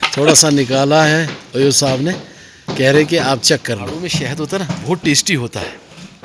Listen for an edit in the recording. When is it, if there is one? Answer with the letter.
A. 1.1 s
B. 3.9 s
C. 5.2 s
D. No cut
B